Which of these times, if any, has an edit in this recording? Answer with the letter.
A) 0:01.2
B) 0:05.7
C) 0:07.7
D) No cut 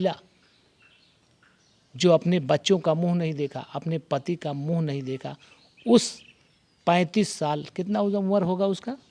D